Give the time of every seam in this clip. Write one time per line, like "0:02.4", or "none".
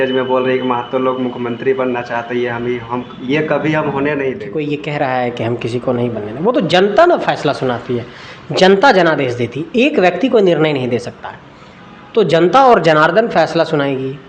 0:04.5

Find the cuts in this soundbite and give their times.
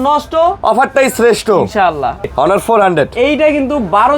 0:02.3

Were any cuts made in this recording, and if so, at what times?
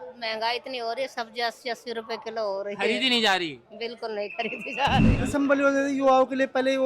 0:05.2

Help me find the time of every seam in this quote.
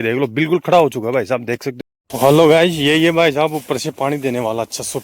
0:01.7

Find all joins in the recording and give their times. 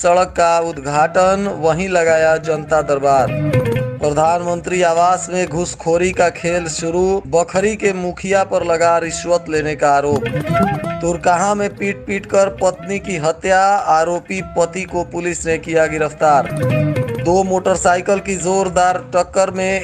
none

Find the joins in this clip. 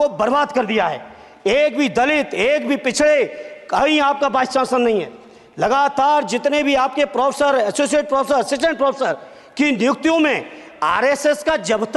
none

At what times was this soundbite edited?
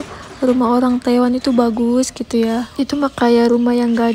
none

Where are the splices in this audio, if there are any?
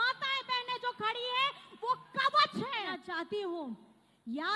0:03.0

